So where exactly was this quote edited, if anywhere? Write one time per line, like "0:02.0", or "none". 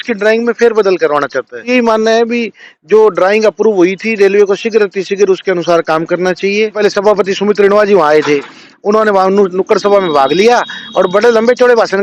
0:01.7
0:06.8